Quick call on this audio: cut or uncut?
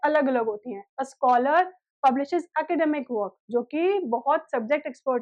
uncut